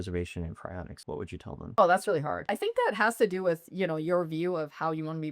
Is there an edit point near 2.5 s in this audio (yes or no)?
yes